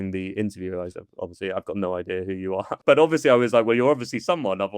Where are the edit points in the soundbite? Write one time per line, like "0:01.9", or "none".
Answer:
0:02.7